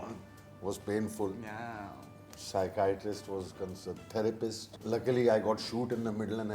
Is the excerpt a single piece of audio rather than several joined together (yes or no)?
no